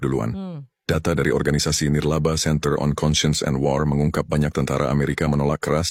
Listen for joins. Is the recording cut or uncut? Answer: uncut